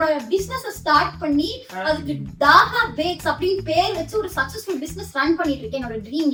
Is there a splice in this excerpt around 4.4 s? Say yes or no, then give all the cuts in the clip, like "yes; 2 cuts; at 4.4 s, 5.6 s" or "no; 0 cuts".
no; 0 cuts